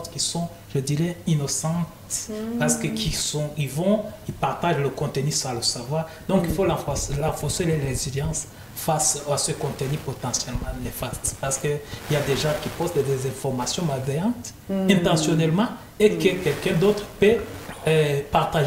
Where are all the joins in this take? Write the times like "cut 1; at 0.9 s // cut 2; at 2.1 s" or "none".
none